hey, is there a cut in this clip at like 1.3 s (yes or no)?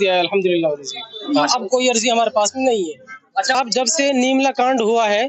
no